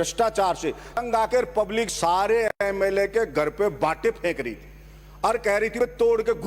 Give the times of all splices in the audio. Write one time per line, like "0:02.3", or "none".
0:01.0